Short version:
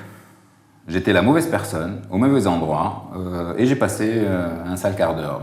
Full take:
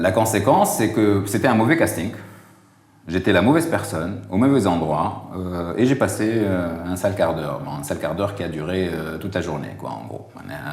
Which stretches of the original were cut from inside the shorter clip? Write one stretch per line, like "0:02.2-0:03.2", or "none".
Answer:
none